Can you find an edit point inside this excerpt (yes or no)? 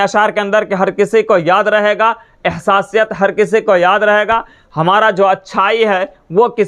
no